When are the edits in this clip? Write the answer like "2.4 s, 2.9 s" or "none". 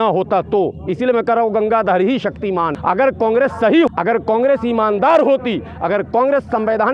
2.7 s, 3.9 s